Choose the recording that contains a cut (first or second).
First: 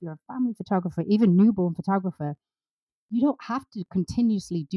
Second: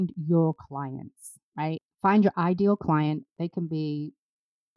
second